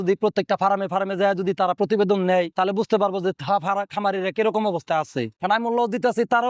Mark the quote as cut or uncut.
uncut